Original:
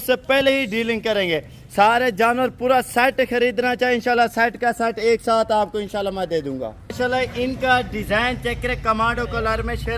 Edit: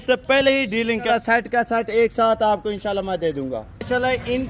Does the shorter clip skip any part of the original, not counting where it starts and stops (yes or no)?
yes